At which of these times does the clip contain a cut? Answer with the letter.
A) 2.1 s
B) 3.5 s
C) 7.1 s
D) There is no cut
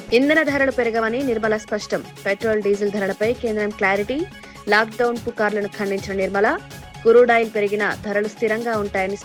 D